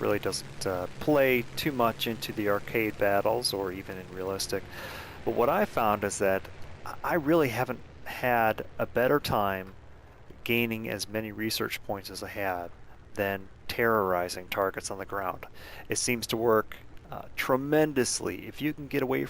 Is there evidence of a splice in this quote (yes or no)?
yes